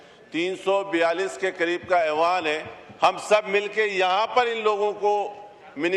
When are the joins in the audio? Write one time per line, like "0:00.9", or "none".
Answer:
none